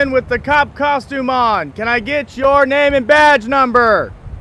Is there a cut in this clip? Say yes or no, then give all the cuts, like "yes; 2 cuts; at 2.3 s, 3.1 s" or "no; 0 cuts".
no; 0 cuts